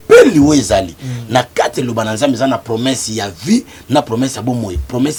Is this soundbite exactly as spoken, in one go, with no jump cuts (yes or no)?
yes